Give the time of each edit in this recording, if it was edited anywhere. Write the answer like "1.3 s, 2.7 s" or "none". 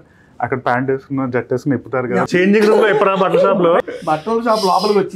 2.3 s, 3.8 s